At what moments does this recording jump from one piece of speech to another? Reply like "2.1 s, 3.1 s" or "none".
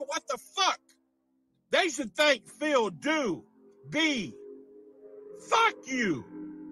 5.8 s